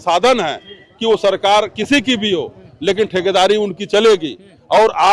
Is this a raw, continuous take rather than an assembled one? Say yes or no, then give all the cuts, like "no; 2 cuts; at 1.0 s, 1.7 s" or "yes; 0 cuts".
yes; 0 cuts